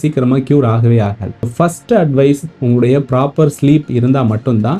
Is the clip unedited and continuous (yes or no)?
yes